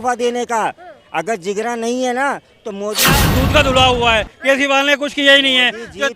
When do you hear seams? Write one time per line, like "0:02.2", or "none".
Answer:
0:03.1